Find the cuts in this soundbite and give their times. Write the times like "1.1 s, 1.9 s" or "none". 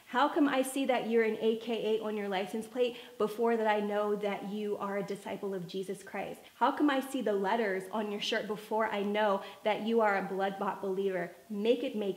6.4 s